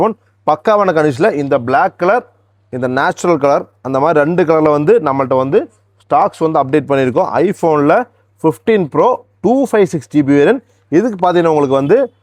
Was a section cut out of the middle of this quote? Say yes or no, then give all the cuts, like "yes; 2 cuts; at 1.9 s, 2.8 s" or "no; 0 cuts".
no; 0 cuts